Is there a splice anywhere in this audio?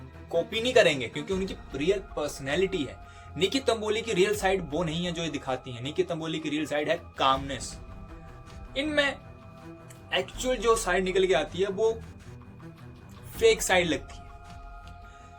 no; 0 cuts

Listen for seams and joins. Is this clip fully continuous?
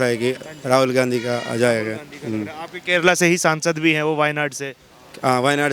yes; 0 cuts

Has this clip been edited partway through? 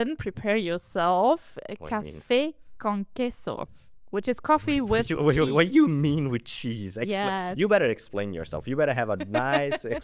no; 0 cuts

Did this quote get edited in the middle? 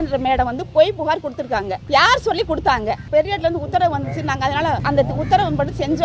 yes; 3 cuts; at 1.8 s, 3.1 s, 4.8 s

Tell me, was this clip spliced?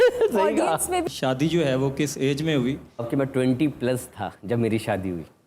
yes; 1 cut; at 1.0 s

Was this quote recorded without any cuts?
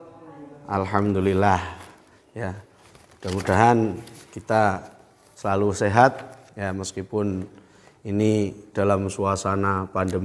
yes; 0 cuts

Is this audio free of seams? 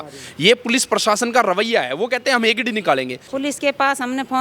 no; 1 cut; at 3.2 s

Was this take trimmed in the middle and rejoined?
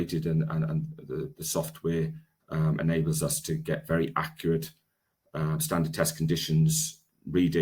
no; 0 cuts

